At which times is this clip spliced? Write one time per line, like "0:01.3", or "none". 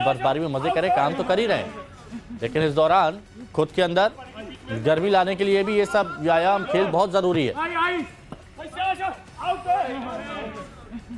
0:07.7